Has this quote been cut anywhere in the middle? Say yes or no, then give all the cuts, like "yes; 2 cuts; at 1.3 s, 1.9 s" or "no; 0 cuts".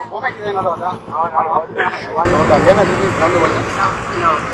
no; 0 cuts